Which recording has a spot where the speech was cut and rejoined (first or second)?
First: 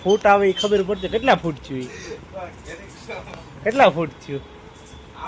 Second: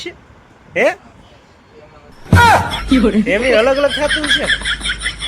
second